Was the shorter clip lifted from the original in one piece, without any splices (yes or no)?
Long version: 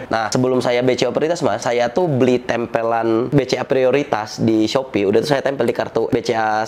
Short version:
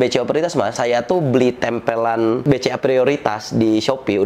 yes